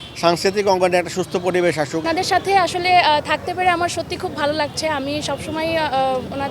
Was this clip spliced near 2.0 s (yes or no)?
yes